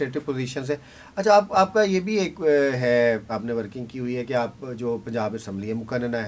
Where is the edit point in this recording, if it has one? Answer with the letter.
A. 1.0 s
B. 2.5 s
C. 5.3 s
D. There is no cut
D